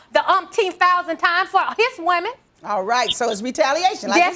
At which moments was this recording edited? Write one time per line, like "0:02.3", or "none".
none